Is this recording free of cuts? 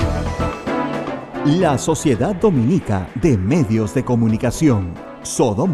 no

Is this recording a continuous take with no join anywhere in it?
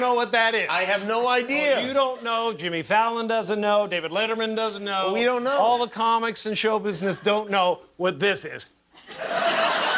yes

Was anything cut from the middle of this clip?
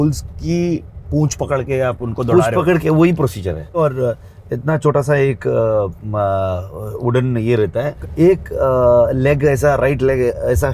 yes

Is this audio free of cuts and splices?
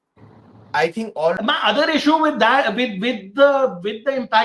no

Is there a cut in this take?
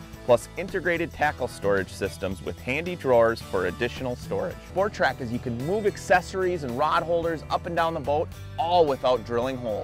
no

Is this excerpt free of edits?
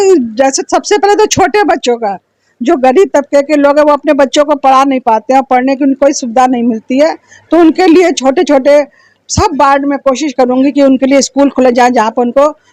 yes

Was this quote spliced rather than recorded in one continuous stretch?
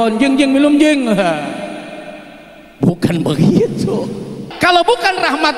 yes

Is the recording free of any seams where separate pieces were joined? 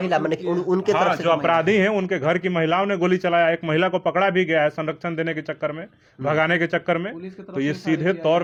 yes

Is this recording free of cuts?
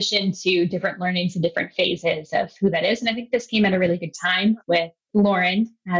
yes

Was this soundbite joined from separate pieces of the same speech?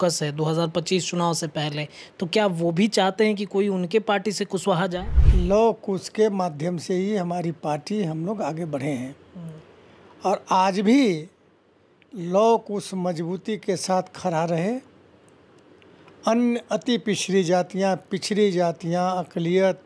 yes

